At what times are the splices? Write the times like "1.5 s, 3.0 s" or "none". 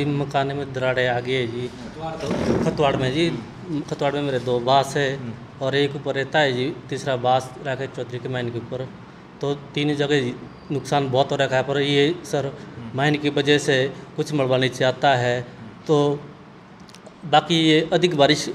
none